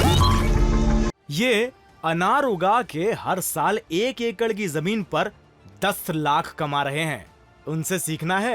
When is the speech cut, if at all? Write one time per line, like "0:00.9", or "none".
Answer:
0:01.1